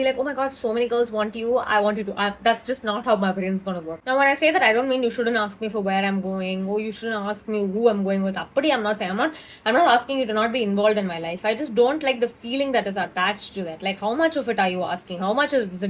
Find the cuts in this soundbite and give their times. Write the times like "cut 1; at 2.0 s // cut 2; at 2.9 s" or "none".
none

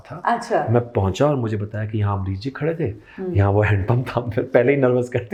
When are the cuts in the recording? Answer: none

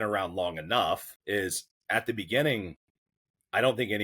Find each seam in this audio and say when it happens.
cut 1; at 1.1 s

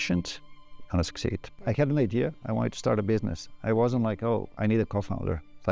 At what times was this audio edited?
cut 1; at 1.6 s

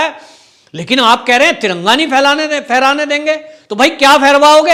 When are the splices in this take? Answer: none

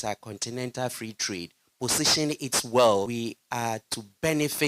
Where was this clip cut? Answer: cut 1; at 3.1 s

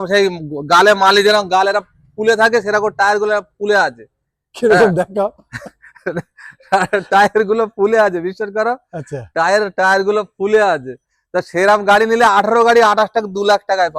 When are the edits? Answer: none

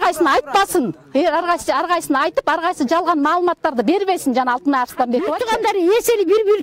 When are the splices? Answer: cut 1; at 5.4 s

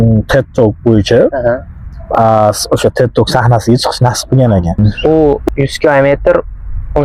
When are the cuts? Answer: cut 1; at 4.8 s

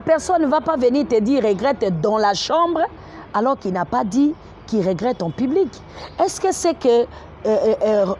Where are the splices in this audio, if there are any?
none

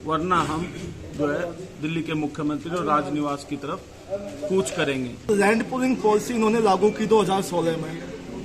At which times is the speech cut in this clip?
cut 1; at 5.2 s

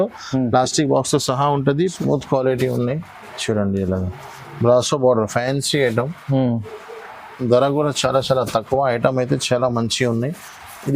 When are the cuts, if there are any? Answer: cut 1; at 1.9 s

